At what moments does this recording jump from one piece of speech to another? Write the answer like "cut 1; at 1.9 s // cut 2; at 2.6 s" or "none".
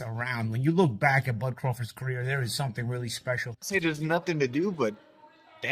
cut 1; at 3.7 s